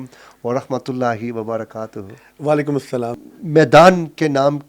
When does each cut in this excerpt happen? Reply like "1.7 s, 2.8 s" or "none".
3.2 s